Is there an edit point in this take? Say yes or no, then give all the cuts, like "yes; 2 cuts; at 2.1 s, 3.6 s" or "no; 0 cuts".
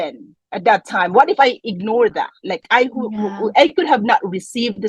no; 0 cuts